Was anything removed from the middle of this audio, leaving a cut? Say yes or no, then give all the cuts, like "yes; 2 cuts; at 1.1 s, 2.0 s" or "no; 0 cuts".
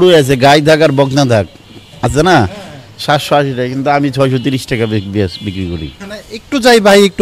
no; 0 cuts